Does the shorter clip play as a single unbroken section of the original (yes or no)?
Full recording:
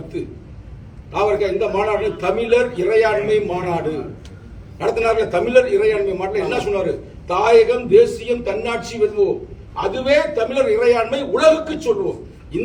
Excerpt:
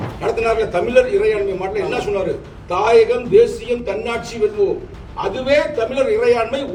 yes